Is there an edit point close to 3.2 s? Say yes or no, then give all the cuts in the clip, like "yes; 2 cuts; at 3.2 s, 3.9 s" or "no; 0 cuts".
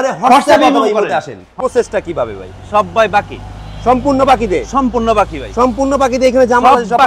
no; 1 cut; at 1.5 s